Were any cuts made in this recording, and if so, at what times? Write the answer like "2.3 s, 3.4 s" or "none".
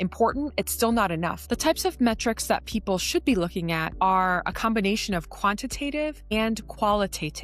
1.4 s, 3.9 s